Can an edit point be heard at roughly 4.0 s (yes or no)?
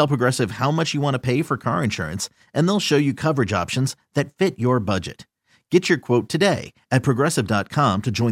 no